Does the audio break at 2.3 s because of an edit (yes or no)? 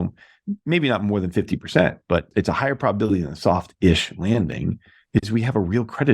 yes